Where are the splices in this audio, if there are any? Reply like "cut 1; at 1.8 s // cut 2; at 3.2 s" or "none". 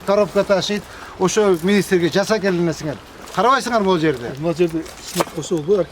none